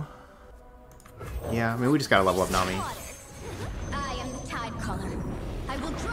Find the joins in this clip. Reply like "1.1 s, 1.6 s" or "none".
none